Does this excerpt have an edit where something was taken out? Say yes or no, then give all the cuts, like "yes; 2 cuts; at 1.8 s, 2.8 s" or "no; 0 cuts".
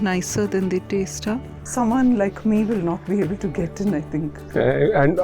yes; 1 cut; at 1.7 s